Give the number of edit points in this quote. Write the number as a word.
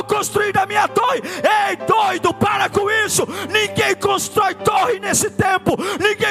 zero